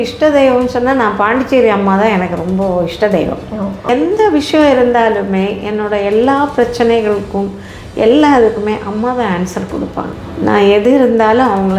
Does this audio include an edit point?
yes; 2 cuts; at 3.9 s, 10.2 s

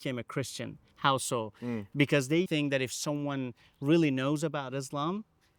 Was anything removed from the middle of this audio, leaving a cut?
yes; 1 cut; at 2.5 s

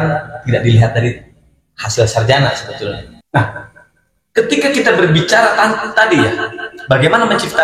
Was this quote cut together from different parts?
yes; 1 cut; at 3.1 s

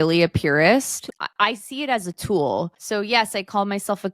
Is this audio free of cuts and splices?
no; 2 cuts; at 1.0 s, 2.8 s

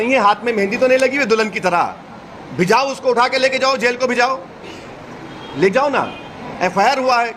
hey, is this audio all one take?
yes; 0 cuts

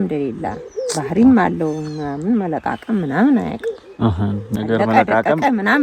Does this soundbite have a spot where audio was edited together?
no; 0 cuts

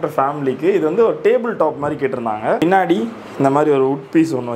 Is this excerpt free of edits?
no; 1 cut; at 2.6 s

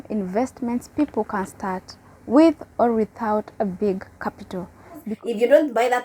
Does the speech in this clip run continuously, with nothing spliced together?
no; 1 cut; at 5.1 s

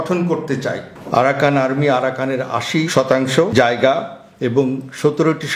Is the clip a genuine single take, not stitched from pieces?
no; 2 cuts; at 0.9 s, 2.9 s

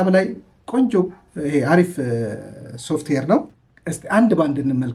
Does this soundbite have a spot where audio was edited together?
no; 0 cuts

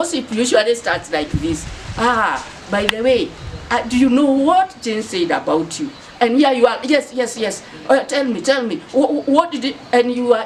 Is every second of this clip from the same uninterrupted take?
yes; 0 cuts

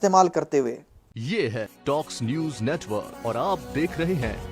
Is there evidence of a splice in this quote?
yes; 1 cut; at 1.1 s

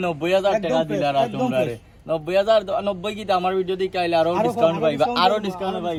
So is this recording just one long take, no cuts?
yes; 0 cuts

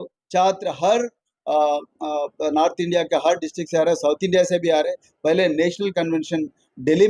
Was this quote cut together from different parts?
no; 0 cuts

